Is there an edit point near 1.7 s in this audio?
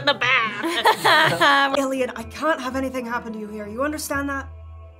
yes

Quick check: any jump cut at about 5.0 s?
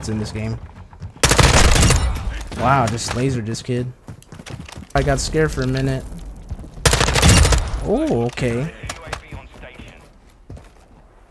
yes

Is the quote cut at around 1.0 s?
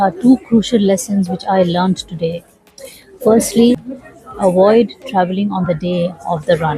no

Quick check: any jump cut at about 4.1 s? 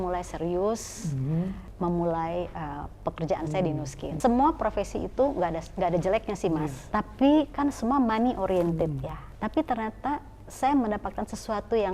yes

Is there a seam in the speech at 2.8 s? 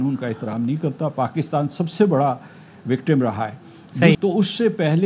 no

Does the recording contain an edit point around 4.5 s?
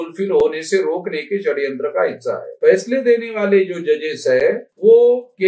no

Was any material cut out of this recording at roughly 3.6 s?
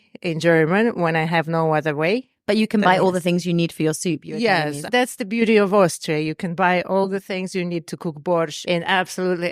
no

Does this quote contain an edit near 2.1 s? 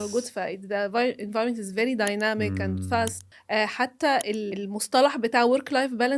no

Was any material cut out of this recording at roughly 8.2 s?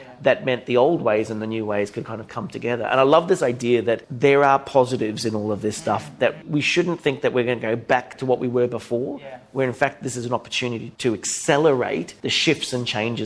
yes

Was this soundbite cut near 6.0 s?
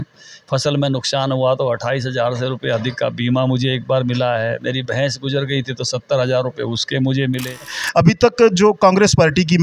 no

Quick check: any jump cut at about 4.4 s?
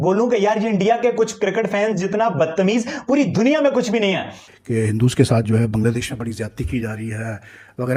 yes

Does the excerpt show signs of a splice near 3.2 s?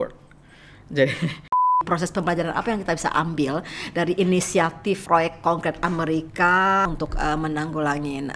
no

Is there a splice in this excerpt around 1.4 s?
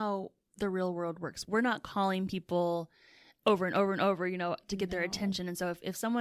yes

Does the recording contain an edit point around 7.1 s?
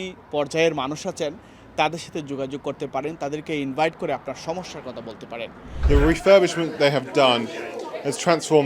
no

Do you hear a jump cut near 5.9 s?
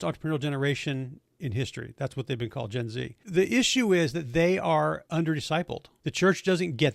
yes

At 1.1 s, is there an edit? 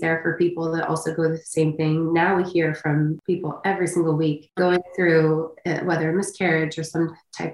no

